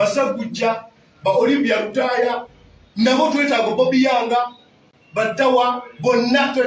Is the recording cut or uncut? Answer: cut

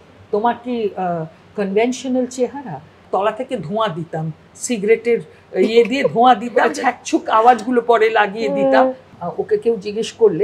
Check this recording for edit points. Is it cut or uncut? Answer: cut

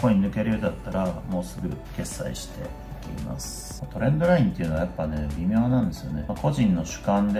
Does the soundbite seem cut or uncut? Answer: uncut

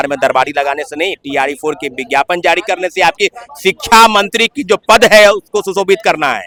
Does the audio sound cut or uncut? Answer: uncut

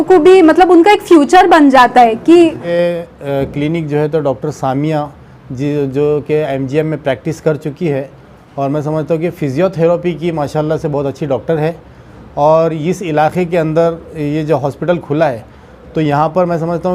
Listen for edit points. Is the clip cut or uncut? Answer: cut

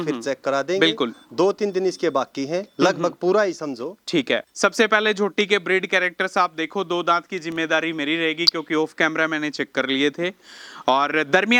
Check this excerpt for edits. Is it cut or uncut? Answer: uncut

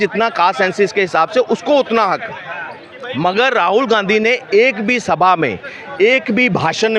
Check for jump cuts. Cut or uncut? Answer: uncut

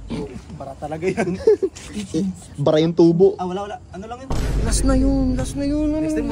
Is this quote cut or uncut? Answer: cut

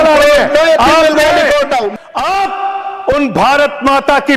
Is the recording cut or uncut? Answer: cut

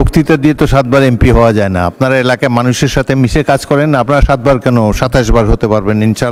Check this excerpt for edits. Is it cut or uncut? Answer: uncut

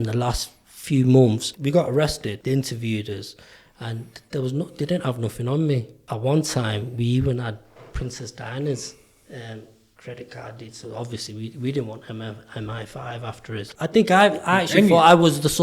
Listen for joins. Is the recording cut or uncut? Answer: cut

